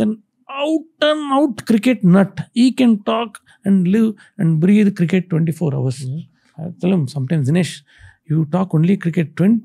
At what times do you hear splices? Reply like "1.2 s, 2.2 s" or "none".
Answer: none